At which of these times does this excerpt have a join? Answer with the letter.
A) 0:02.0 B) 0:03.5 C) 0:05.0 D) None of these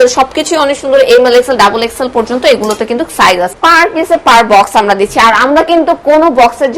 B